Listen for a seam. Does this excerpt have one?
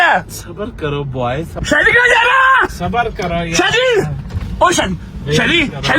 yes; 1 cut; at 1.6 s

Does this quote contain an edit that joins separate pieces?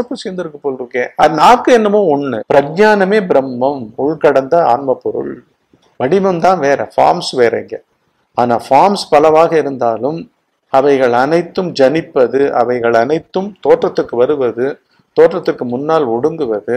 yes; 2 cuts; at 1.2 s, 2.4 s

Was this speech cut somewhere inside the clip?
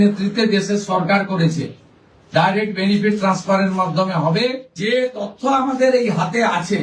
yes; 1 cut; at 4.8 s

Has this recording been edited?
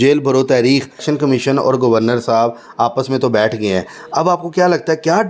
yes; 1 cut; at 1.0 s

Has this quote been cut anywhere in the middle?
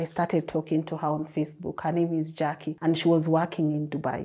yes; 1 cut; at 2.7 s

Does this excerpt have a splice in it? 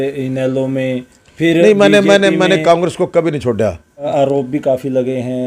yes; 1 cut; at 4.1 s

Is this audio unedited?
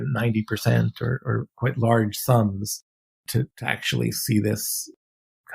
no; 2 cuts; at 1.5 s, 3.3 s

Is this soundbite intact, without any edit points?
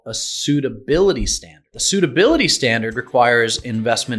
no; 1 cut; at 1.8 s

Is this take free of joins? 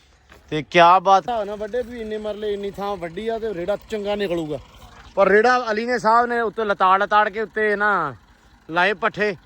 no; 1 cut; at 1.3 s

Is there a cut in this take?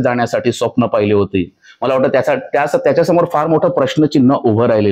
no; 0 cuts

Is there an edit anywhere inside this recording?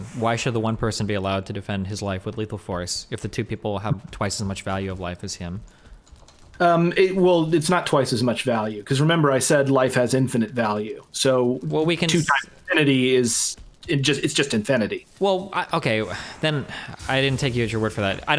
no; 0 cuts

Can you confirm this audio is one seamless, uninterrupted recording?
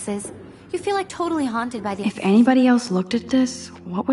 no; 1 cut; at 1.7 s

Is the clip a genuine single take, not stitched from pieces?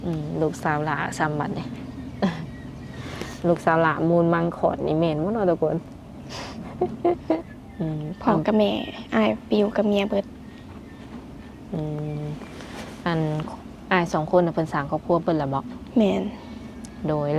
no; 1 cut; at 7.4 s

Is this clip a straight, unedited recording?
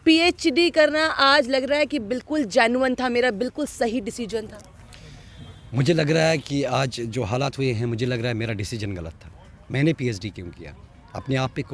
yes; 0 cuts

